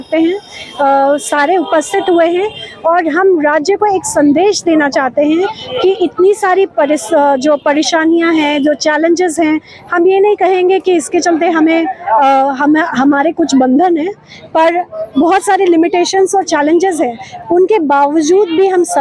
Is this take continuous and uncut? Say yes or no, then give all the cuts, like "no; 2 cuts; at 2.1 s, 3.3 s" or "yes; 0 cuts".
yes; 0 cuts